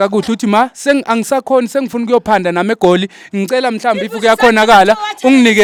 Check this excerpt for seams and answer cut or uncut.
uncut